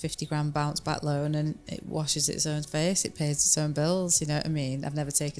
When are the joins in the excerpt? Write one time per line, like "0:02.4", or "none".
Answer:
none